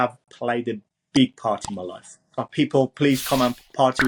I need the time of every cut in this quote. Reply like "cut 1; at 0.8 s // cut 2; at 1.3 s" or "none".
cut 1; at 2.4 s